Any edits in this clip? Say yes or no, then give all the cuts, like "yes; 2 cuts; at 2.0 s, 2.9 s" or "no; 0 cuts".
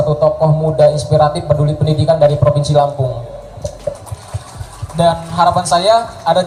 no; 0 cuts